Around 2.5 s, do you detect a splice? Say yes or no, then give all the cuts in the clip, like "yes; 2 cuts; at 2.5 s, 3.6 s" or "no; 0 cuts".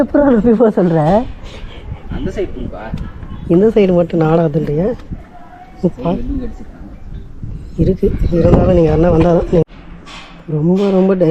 no; 0 cuts